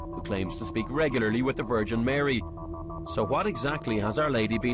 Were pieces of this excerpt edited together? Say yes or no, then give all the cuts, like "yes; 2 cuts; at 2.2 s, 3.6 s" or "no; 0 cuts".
yes; 1 cut; at 0.9 s